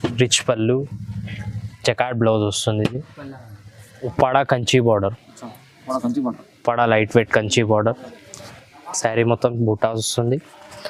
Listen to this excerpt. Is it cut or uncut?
cut